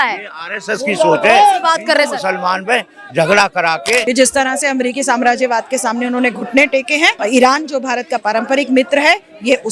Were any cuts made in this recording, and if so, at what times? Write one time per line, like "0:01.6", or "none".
0:04.0
0:07.2